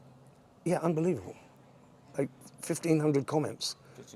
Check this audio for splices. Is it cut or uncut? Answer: uncut